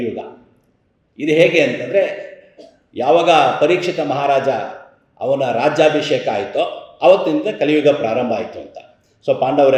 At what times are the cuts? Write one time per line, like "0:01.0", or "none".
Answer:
none